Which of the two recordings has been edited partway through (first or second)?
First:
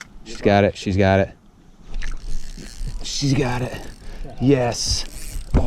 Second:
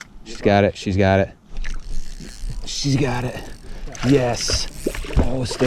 second